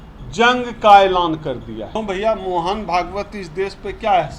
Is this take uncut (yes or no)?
no